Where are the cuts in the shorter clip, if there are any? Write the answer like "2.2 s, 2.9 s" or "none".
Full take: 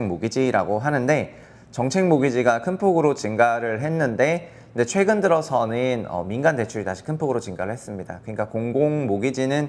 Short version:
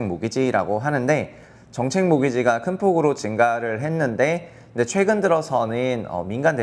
none